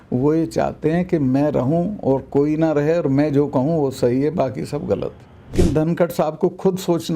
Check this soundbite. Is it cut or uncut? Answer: cut